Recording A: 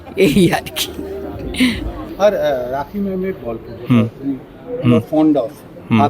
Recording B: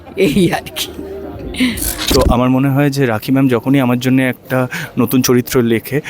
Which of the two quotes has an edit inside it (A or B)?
B